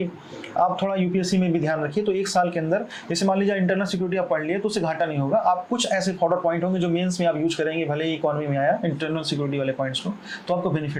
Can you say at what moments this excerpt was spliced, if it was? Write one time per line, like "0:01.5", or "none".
none